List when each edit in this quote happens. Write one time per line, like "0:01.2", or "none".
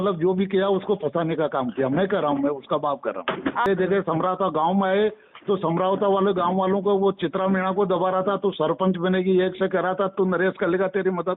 0:03.7

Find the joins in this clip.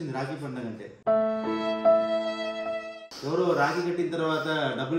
0:02.9

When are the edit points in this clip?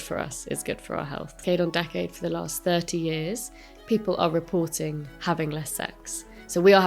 0:01.4

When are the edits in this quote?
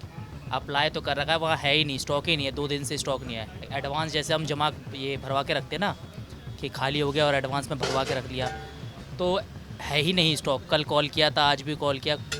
none

